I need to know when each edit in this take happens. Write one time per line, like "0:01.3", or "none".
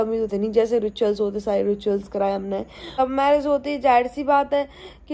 0:02.9